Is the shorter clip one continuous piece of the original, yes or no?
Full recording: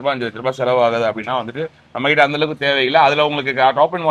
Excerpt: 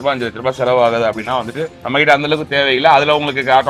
no